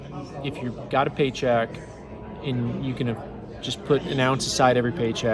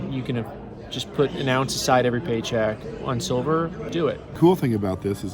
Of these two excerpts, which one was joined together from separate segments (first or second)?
second